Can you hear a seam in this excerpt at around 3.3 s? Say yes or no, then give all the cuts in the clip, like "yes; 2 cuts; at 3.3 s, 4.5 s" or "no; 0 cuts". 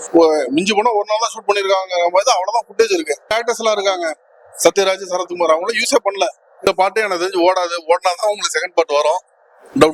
yes; 2 cuts; at 3.3 s, 6.7 s